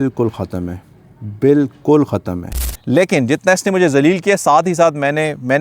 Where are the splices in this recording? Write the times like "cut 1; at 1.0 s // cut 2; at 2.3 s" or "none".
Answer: cut 1; at 2.8 s